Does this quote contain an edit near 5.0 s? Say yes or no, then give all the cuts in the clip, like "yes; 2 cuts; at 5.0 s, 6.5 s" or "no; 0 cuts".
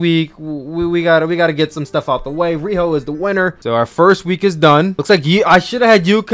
yes; 2 cuts; at 3.6 s, 5.0 s